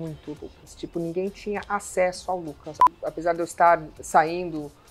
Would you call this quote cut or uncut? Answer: cut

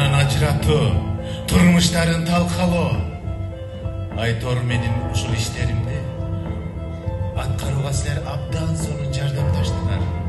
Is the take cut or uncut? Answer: uncut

